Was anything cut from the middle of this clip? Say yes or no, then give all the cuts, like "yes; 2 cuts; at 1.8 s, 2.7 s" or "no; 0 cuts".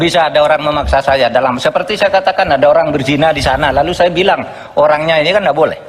no; 0 cuts